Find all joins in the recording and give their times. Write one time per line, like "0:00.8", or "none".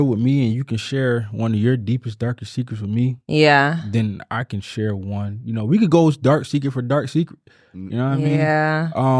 none